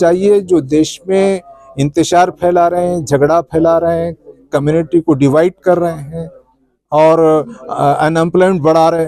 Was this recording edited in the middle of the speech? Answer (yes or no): no